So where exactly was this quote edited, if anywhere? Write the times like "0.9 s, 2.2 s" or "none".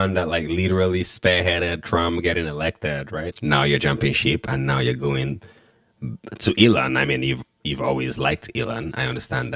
3.3 s